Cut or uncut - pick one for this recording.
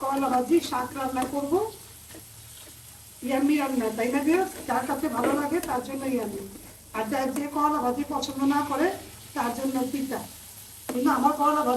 uncut